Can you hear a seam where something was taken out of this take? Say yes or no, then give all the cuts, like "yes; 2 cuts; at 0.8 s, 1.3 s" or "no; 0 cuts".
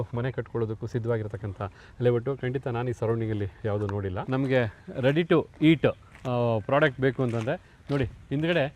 yes; 1 cut; at 4.2 s